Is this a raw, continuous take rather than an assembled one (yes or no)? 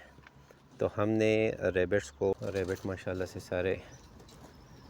no